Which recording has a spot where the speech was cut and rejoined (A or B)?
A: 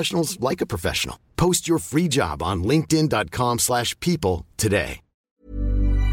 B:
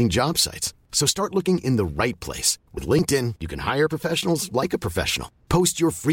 A